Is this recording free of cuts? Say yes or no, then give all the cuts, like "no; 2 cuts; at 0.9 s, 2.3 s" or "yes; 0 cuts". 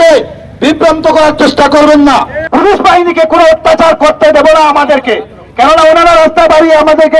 no; 1 cut; at 2.4 s